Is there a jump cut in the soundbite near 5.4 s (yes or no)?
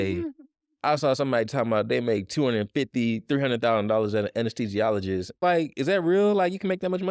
yes